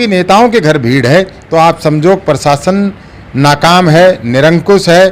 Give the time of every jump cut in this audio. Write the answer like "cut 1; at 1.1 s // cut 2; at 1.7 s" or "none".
none